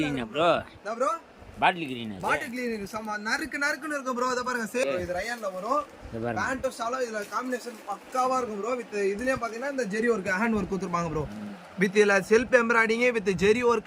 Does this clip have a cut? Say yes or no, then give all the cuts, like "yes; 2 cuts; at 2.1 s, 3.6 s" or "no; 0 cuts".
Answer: yes; 1 cut; at 4.8 s